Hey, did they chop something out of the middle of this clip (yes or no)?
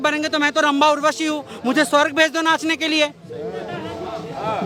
no